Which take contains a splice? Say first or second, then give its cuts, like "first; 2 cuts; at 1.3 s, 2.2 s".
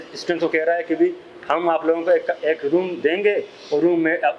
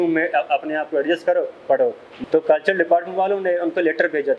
second; 1 cut; at 2.1 s